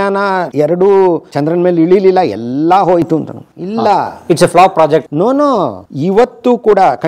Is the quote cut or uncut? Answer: uncut